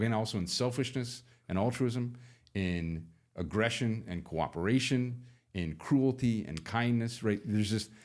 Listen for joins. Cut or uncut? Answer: uncut